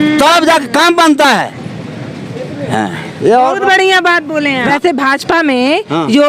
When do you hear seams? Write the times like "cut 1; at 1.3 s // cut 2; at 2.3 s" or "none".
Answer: cut 1; at 4.6 s